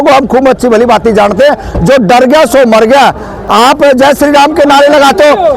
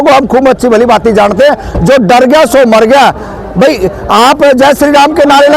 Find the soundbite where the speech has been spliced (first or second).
first